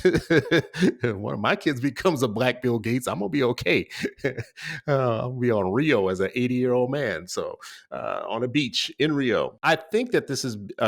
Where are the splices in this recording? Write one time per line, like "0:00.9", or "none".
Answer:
0:09.6